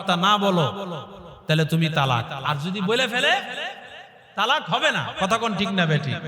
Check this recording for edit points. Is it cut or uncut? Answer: cut